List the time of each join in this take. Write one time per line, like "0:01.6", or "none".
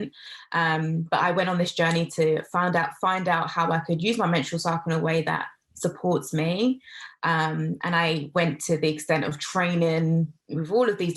none